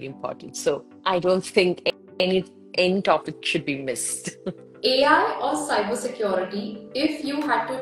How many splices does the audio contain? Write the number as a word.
one